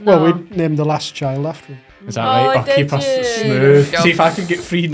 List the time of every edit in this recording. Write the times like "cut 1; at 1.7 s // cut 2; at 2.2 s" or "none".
cut 1; at 3.9 s